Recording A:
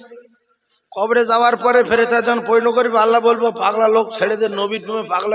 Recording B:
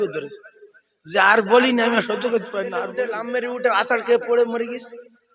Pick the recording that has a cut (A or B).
B